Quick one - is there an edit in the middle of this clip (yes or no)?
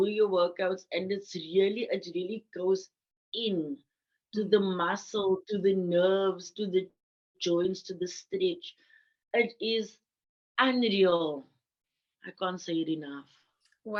no